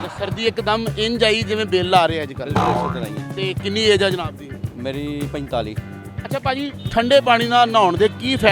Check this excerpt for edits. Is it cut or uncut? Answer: uncut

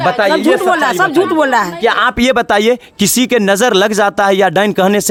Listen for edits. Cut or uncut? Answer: uncut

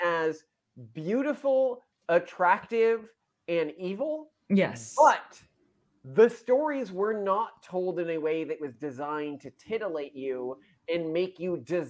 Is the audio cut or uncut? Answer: uncut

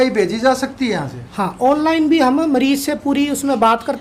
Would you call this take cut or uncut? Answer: uncut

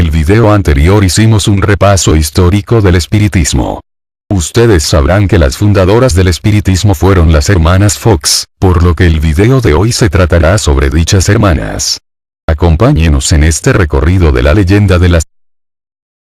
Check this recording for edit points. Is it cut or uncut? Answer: uncut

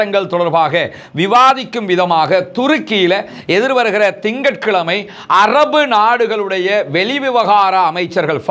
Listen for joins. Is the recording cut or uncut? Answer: uncut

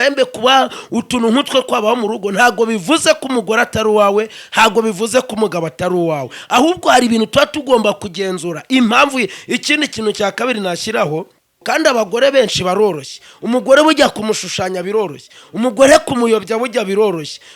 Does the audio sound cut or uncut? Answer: cut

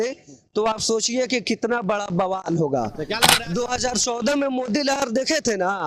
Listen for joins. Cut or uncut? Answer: cut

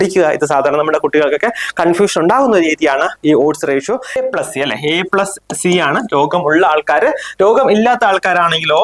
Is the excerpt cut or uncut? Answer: cut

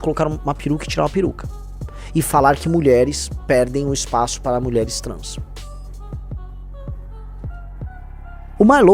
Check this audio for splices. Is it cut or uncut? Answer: uncut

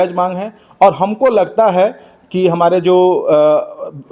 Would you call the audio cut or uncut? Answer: uncut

